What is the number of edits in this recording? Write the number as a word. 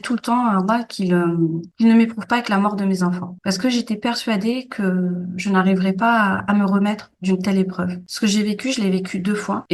one